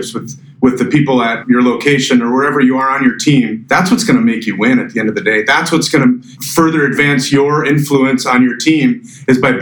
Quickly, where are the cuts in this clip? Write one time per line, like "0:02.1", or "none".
0:01.4
0:03.6
0:06.3